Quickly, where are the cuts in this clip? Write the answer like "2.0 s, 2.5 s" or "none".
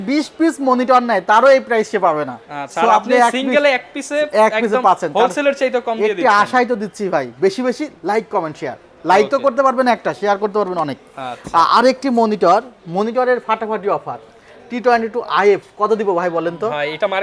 none